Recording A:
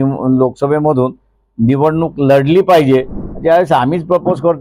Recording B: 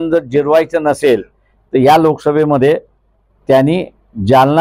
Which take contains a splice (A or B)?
A